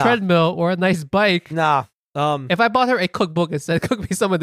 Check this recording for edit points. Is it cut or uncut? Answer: cut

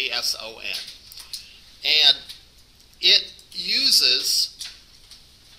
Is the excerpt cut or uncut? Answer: uncut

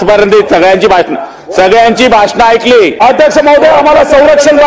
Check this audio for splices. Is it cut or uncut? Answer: cut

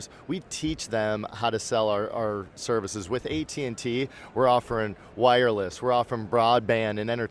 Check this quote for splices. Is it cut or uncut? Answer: uncut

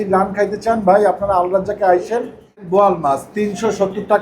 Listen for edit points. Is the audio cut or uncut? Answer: cut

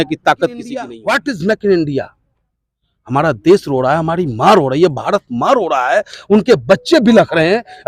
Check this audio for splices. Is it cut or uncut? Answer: cut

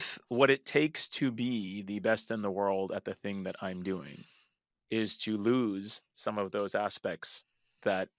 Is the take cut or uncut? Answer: uncut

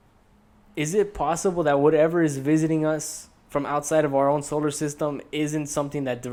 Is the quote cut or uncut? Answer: uncut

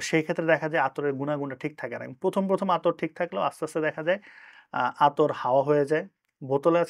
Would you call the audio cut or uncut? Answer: uncut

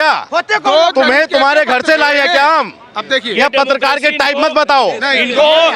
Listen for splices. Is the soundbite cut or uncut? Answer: uncut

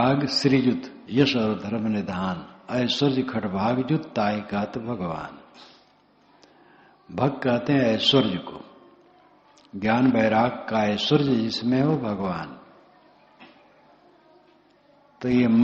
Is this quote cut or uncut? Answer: cut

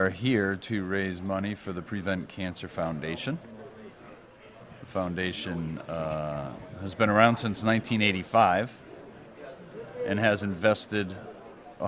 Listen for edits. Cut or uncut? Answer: cut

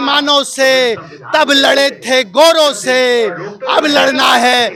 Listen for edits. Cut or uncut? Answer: uncut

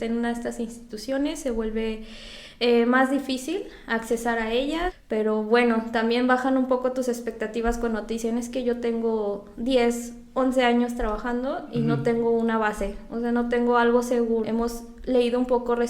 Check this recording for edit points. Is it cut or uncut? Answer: cut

